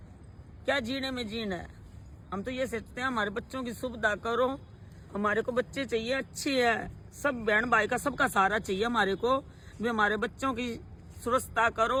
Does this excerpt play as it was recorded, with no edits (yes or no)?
yes